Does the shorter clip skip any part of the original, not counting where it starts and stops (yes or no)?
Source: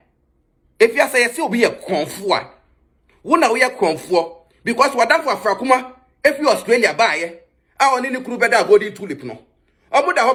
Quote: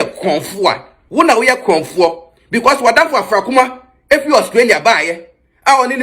yes